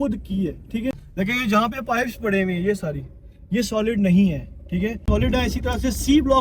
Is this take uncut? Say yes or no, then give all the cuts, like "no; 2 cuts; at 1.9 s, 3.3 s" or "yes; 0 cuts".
no; 2 cuts; at 1.0 s, 5.0 s